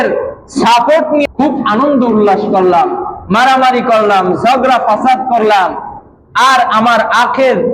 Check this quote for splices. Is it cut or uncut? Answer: cut